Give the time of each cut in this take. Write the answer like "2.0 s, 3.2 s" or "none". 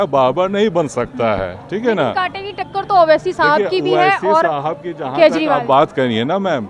none